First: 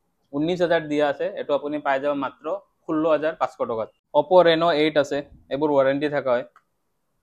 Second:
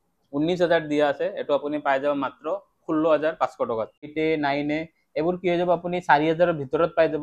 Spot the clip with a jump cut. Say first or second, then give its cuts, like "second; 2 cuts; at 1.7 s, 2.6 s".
second; 1 cut; at 4.1 s